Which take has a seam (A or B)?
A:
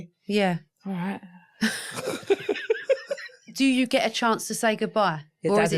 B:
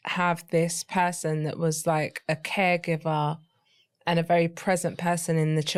A